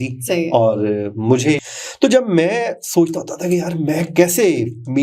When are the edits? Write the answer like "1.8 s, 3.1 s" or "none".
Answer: 1.6 s